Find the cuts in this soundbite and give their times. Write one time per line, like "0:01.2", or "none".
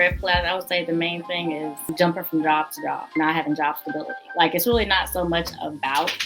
0:01.8
0:03.0
0:04.1